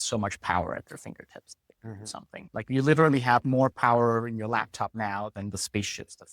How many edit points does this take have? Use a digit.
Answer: 1